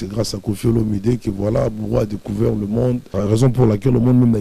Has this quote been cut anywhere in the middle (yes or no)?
yes